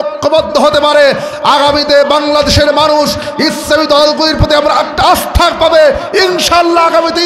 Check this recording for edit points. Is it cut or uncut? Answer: uncut